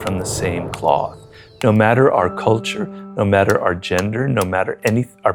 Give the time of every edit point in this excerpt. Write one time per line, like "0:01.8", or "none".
none